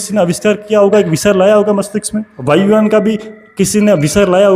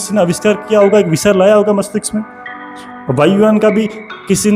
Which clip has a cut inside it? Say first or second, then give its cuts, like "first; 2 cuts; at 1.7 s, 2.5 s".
first; 1 cut; at 2.3 s